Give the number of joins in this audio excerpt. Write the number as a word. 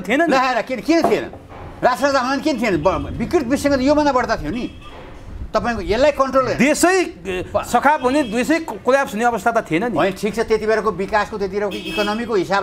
zero